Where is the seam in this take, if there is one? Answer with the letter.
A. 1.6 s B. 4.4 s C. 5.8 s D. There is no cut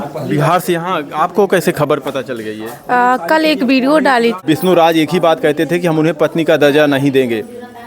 B